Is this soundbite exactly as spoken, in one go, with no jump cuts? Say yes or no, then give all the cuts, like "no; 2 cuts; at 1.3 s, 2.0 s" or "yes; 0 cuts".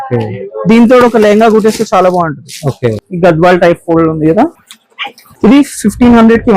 no; 1 cut; at 3.0 s